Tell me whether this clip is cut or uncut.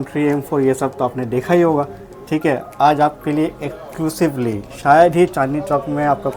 uncut